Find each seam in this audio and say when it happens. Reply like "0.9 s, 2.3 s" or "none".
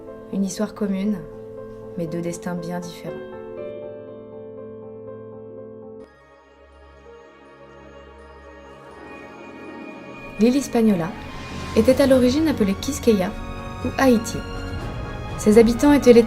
1.5 s